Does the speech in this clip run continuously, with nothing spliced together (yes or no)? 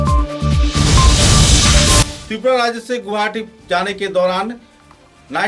no